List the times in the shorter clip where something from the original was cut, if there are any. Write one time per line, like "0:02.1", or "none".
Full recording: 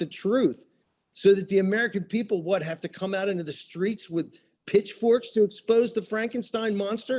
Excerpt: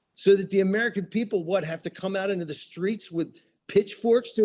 none